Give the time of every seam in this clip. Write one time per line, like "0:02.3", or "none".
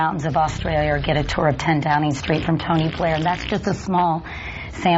0:02.2

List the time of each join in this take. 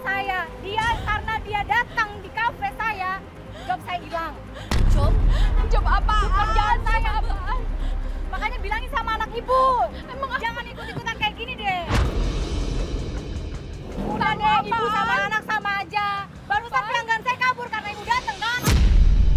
none

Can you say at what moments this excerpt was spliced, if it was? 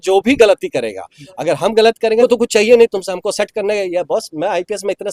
0:02.2

